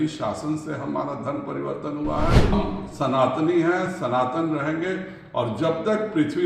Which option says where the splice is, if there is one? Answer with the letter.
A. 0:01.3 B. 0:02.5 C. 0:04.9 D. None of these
B